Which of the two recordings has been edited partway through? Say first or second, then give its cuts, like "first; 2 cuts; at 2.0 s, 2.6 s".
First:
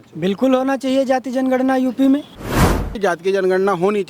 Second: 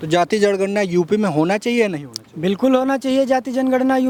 first; 1 cut; at 2.8 s